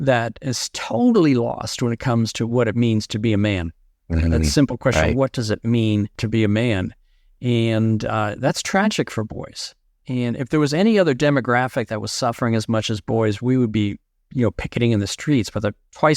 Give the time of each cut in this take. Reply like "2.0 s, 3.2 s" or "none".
6.2 s

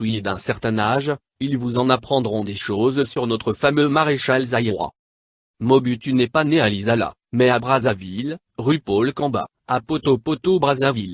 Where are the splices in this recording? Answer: 6.9 s

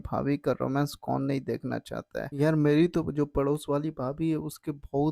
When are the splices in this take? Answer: 2.3 s

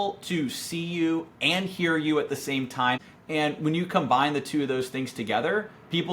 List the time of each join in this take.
3.0 s

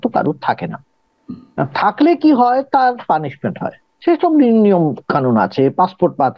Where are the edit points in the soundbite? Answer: none

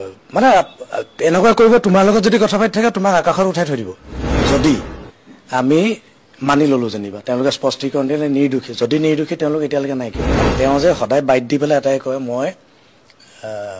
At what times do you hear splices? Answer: 4.3 s, 10.4 s

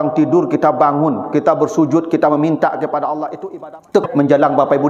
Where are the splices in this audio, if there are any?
3.9 s

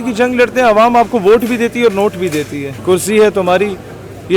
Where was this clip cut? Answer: 2.7 s

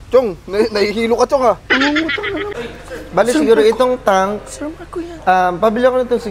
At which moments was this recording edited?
2.5 s

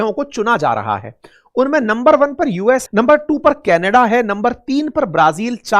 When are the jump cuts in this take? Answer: 2.8 s

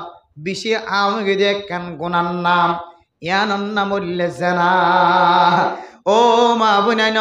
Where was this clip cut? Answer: none

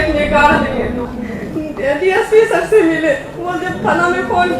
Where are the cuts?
1.1 s

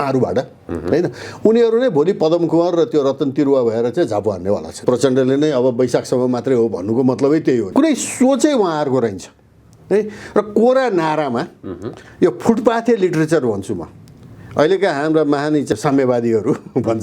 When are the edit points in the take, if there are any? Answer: 4.8 s, 7.7 s, 15.7 s

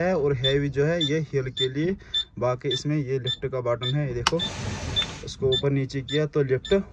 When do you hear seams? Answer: none

